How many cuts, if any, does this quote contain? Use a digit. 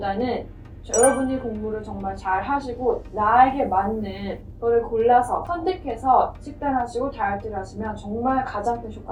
0